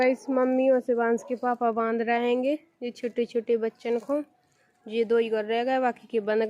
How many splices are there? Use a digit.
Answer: 0